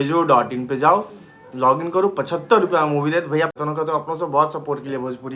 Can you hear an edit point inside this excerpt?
yes; 1 cut; at 3.6 s

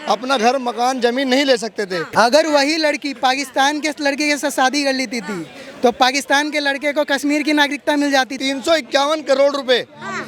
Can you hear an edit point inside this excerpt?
yes; 2 cuts; at 2.1 s, 8.4 s

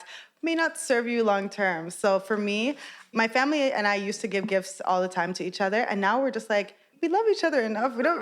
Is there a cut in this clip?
yes; 1 cut; at 6.9 s

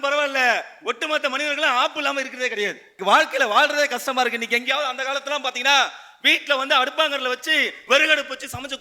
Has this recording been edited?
yes; 1 cut; at 2.9 s

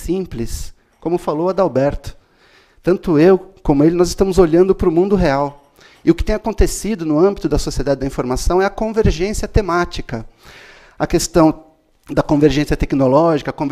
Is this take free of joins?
yes; 0 cuts

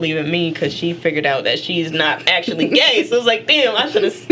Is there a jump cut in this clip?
no; 0 cuts

